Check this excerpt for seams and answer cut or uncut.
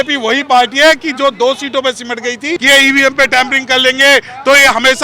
cut